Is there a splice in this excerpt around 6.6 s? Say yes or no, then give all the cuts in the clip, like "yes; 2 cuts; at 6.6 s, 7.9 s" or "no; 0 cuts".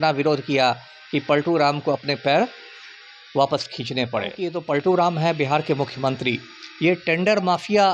no; 1 cut; at 4.5 s